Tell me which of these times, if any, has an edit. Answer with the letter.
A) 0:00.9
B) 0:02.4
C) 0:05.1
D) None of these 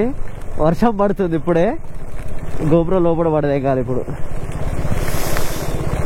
D